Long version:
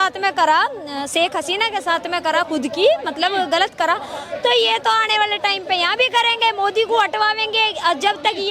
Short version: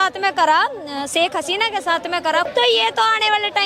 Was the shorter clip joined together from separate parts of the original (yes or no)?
yes